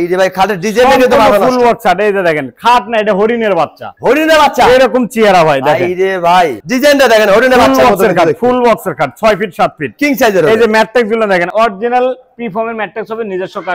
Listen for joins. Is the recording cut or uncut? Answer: uncut